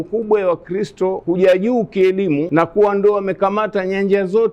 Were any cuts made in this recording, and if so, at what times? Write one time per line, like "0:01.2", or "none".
0:01.2
0:02.5